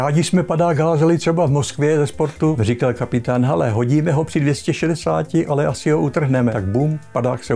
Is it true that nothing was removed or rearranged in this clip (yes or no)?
no